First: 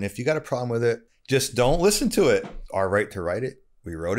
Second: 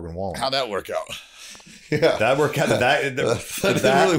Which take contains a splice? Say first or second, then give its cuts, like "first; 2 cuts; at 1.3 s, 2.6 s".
first; 2 cuts; at 1.1 s, 2.6 s